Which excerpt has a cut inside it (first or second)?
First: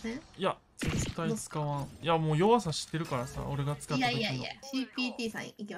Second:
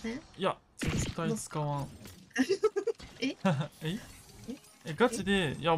first